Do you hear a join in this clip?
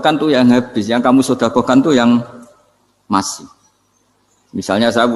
no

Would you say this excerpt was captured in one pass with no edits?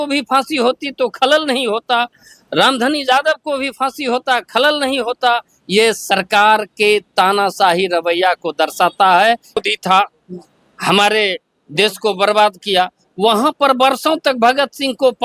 no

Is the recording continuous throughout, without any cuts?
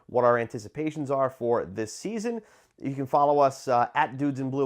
yes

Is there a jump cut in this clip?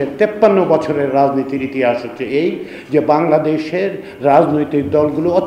no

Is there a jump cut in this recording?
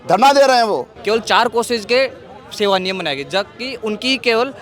yes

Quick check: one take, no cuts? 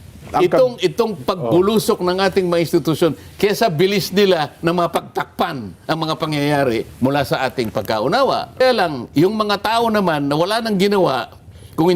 no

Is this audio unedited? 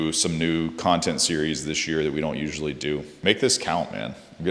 no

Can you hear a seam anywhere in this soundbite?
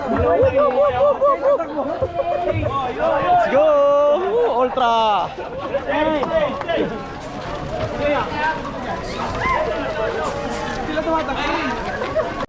no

